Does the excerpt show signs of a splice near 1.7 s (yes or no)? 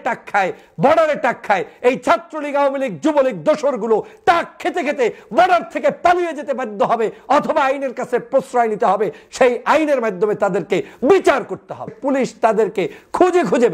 no